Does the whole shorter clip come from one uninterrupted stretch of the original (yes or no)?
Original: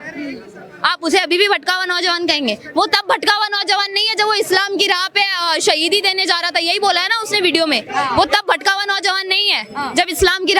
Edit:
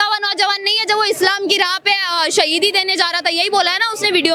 yes